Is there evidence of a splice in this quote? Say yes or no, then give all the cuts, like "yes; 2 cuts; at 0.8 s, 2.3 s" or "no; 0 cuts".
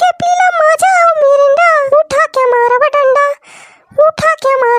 yes; 1 cut; at 1.8 s